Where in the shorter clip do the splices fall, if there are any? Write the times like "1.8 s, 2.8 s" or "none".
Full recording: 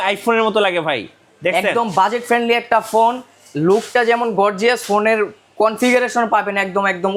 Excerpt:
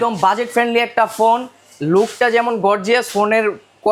none